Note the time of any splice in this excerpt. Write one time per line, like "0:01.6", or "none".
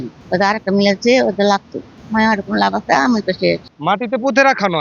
0:01.9
0:03.7